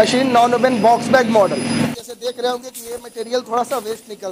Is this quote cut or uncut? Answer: cut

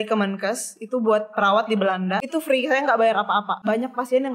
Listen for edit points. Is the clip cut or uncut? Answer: cut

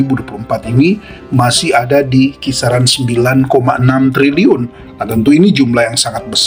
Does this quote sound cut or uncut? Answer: uncut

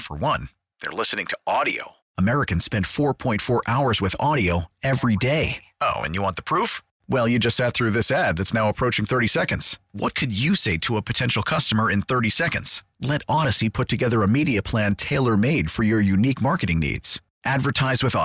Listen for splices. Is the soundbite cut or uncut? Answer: uncut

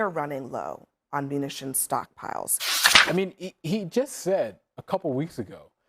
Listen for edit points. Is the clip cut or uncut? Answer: cut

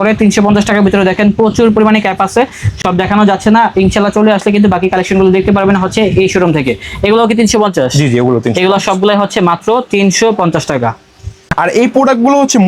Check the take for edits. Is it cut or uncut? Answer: uncut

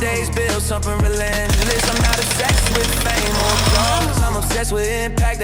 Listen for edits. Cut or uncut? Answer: uncut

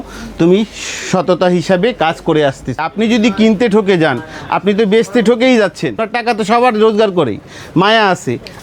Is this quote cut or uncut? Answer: cut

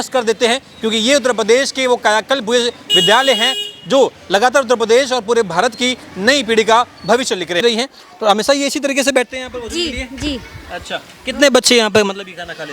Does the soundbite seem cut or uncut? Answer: cut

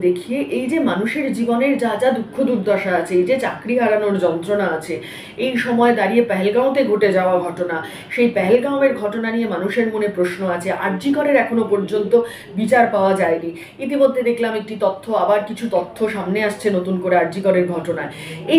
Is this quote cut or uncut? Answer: uncut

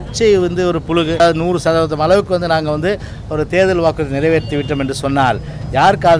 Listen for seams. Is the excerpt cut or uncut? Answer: cut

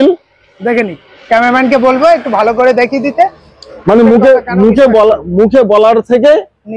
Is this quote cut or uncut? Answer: uncut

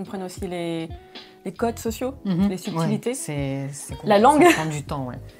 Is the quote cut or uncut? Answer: uncut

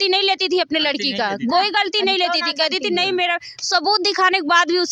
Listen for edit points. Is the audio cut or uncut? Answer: uncut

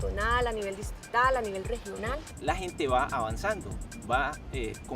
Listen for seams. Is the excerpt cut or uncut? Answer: cut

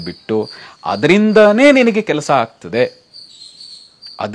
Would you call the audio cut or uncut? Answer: uncut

